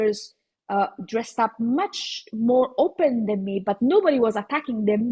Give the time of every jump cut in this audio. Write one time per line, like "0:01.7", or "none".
none